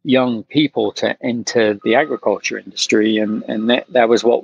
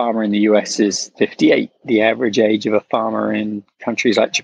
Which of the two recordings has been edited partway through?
first; 1 cut; at 1.8 s

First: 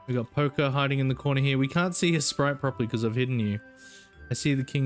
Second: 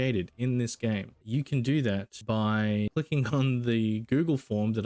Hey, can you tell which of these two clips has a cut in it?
second; 3 cuts; at 1.2 s, 2.1 s, 2.9 s

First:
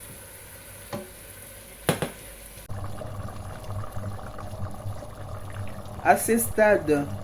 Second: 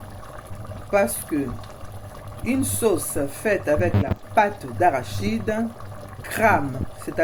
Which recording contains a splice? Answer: first; 1 cut; at 2.7 s

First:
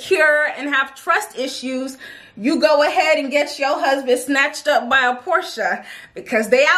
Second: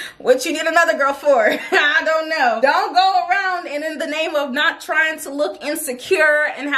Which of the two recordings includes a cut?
second; 1 cut; at 2.6 s

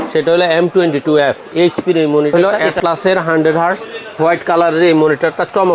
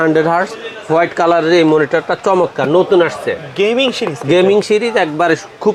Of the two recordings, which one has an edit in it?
first; 1 cut; at 2.3 s

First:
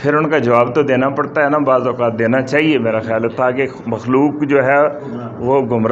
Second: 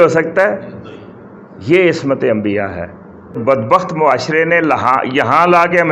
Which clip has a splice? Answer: second; 1 cut; at 3.4 s

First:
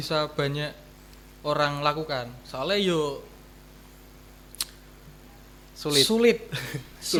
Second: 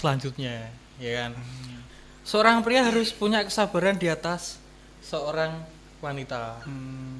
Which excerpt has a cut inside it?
second; 1 cut; at 1.8 s

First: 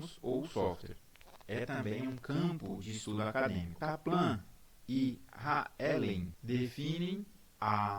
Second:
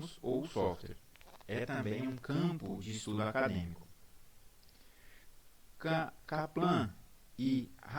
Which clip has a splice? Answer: first; 2 cuts; at 3.7 s, 6.4 s

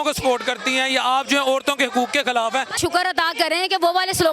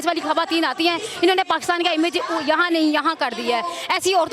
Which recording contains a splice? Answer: first; 1 cut; at 2.8 s

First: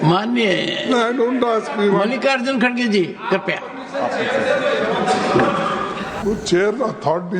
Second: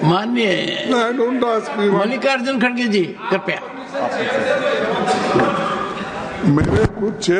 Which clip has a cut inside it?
first; 1 cut; at 6.2 s

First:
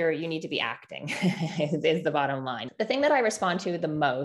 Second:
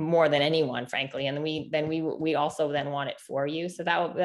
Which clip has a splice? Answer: first; 1 cut; at 2.6 s

